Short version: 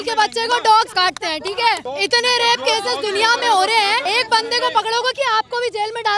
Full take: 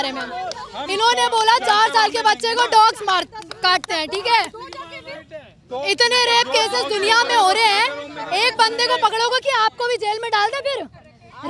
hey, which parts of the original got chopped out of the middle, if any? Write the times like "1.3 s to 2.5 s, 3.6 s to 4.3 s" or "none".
3.0 s to 3.6 s, 4.5 s to 5.7 s, 7.9 s to 8.3 s